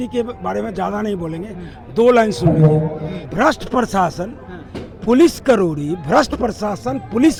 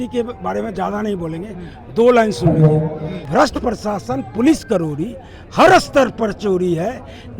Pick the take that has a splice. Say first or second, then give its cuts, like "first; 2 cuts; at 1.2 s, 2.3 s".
second; 1 cut; at 3.2 s